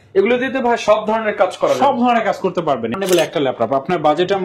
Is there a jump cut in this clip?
yes; 1 cut; at 2.9 s

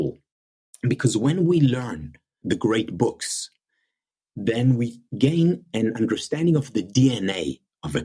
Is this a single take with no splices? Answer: no; 2 cuts; at 2.4 s, 5.1 s

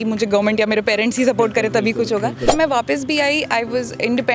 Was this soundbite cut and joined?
yes; 1 cut; at 2.5 s

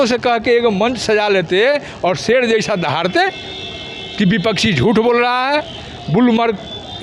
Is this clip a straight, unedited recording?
yes; 0 cuts

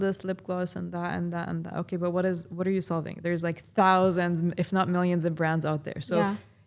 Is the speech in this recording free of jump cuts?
yes; 0 cuts

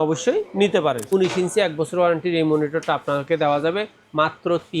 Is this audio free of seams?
no; 1 cut; at 1.1 s

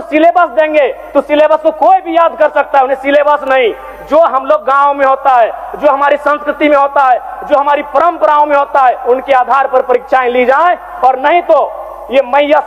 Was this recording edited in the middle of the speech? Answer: no; 0 cuts

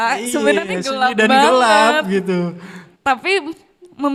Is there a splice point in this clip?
no; 0 cuts

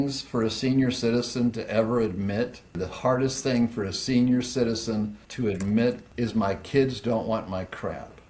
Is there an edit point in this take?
yes; 3 cuts; at 2.8 s, 5.2 s, 6.1 s

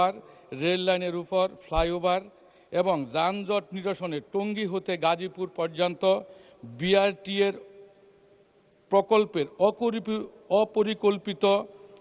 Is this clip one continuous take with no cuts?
yes; 0 cuts

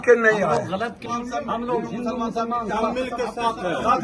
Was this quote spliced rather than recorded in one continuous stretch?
yes; 1 cut; at 1.0 s

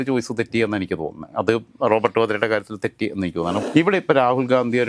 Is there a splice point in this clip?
yes; 1 cut; at 3.6 s

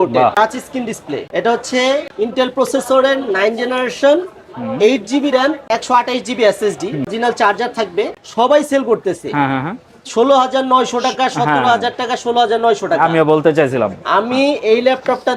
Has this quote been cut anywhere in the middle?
no; 0 cuts

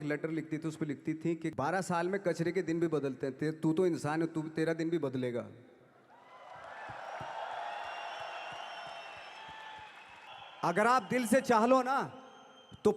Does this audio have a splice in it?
yes; 2 cuts; at 1.5 s, 10.2 s

